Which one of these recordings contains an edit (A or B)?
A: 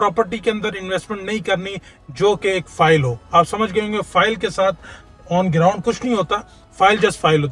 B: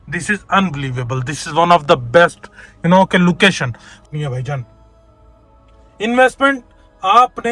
B